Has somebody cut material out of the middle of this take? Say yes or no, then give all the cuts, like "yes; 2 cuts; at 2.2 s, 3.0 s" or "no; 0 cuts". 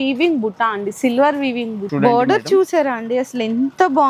yes; 1 cut; at 1.8 s